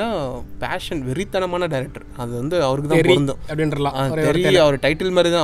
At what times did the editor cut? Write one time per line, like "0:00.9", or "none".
none